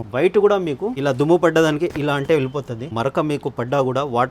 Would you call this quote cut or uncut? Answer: cut